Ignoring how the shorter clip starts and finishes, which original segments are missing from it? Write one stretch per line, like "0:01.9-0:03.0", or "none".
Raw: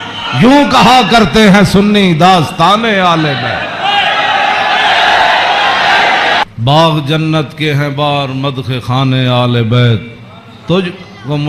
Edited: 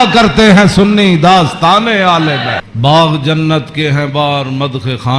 0:03.7-0:06.5